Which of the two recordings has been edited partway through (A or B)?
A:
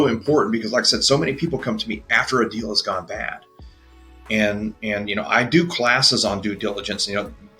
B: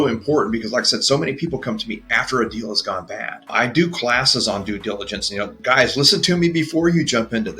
B